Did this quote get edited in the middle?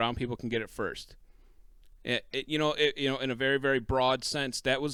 no; 0 cuts

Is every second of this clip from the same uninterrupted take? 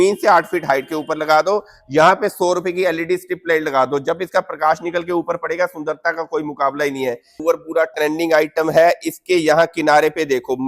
no; 1 cut; at 7.4 s

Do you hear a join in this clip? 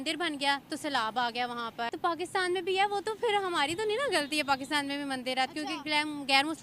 yes; 1 cut; at 1.8 s

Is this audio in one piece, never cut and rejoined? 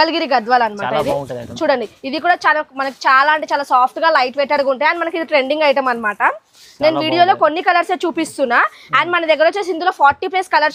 yes; 0 cuts

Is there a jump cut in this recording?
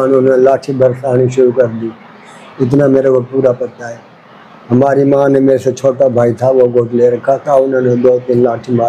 no; 0 cuts

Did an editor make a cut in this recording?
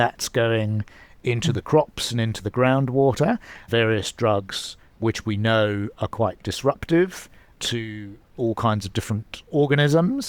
yes; 3 cuts; at 3.6 s, 7.5 s, 9.4 s

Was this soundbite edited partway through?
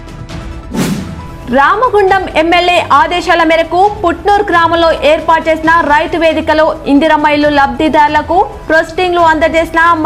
yes; 1 cut; at 0.9 s

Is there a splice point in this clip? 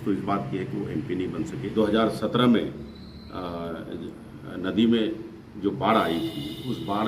yes; 1 cut; at 1.6 s

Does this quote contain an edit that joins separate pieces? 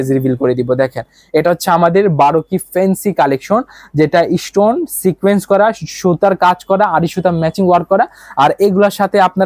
no; 0 cuts

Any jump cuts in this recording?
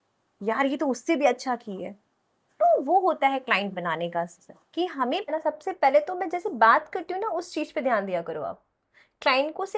yes; 1 cut; at 5.3 s

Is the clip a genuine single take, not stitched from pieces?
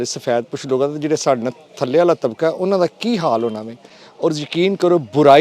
yes; 0 cuts

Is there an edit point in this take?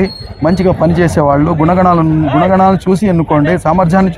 no; 0 cuts

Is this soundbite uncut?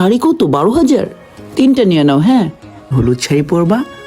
no; 1 cut; at 2.9 s

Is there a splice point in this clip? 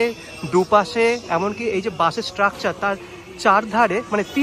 no; 0 cuts

